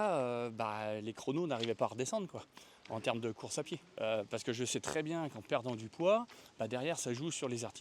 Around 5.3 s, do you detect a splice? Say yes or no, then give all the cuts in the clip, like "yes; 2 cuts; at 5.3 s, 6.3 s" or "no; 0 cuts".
no; 1 cut; at 3.8 s